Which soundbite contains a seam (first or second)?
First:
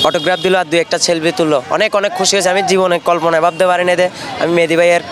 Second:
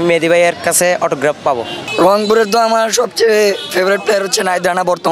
second